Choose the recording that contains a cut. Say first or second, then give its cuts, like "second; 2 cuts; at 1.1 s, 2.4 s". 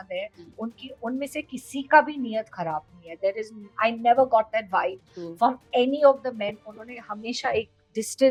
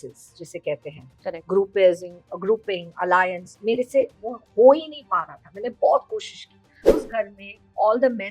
second; 1 cut; at 6.8 s